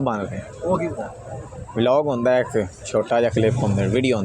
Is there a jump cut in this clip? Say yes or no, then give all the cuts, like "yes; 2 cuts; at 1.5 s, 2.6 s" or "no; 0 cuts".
yes; 1 cut; at 1.7 s